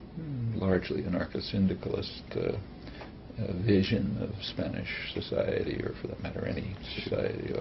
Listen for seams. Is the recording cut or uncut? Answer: cut